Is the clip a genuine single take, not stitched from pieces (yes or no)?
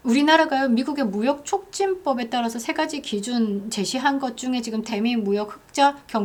yes